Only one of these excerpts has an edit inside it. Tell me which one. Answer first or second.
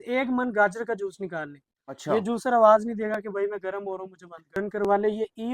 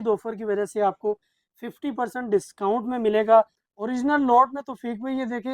first